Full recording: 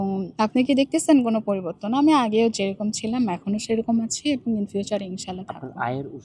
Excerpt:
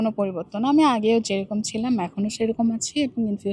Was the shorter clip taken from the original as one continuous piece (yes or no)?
yes